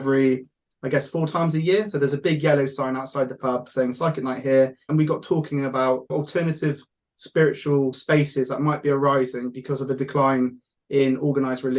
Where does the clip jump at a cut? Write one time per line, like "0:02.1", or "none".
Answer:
0:04.8
0:06.1
0:08.0